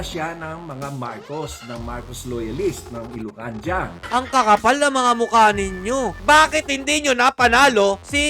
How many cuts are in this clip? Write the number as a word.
two